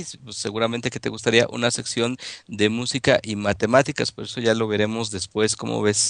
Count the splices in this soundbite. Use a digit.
1